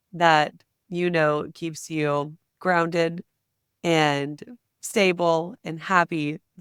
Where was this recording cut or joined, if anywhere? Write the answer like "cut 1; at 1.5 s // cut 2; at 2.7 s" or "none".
none